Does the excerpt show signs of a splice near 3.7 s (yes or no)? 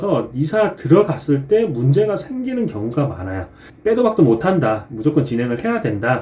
yes